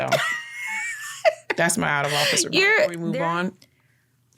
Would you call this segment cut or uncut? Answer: cut